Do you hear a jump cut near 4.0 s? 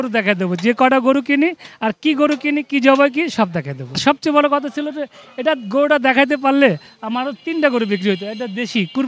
yes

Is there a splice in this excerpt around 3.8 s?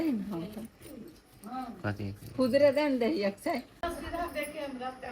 yes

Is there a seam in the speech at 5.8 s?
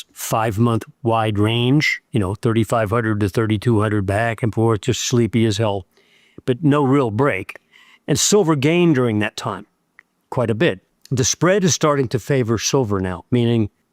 no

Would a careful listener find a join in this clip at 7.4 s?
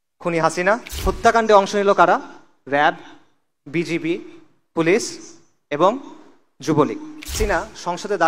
yes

